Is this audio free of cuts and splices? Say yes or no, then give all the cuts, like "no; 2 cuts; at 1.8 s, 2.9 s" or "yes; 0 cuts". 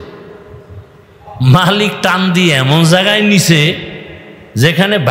yes; 0 cuts